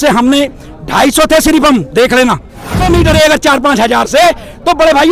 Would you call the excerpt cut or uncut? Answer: cut